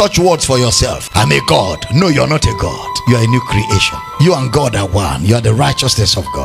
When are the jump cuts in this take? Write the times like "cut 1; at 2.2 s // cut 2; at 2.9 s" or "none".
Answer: cut 1; at 1.0 s // cut 2; at 2.9 s // cut 3; at 4.0 s